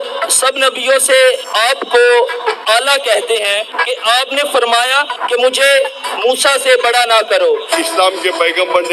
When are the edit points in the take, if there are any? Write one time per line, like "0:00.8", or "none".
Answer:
0:01.5
0:03.8
0:05.2
0:07.7

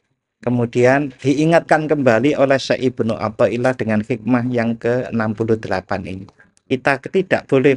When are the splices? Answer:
0:06.5

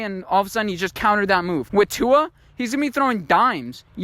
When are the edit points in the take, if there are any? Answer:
0:01.7

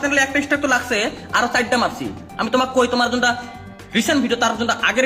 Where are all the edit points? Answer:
none

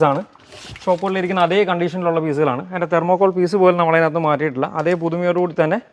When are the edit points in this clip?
none

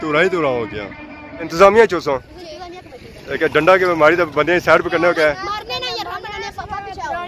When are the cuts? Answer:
0:01.5

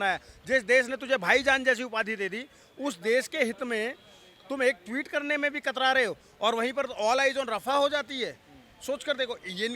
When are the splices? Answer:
none

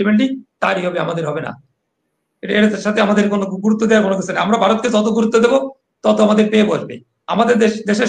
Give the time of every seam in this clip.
none

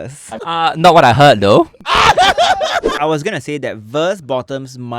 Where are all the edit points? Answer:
0:02.9

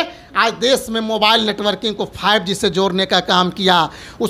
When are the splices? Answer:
none

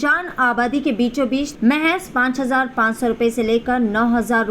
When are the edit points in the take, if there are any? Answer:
0:01.5

